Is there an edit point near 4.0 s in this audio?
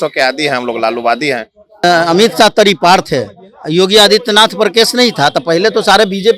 no; 1 cut; at 1.8 s

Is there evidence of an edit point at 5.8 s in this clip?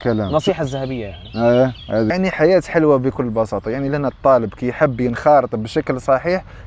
no; 1 cut; at 2.1 s

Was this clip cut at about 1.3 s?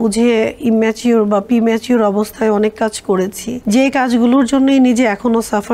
no; 1 cut; at 3.5 s

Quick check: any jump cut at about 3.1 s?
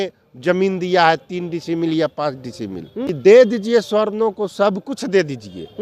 yes; 1 cut; at 3.1 s

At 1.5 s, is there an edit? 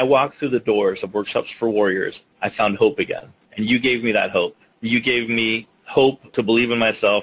no; 2 cuts; at 4.7 s, 6.0 s

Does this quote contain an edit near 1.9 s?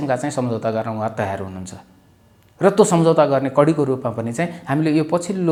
no; 0 cuts

